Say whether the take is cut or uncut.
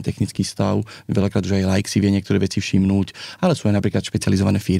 uncut